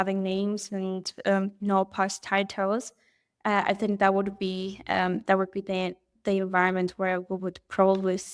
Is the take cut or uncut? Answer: uncut